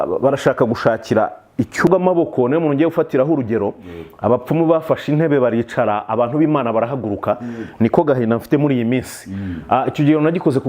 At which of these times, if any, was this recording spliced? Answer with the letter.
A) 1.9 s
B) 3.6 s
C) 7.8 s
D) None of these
A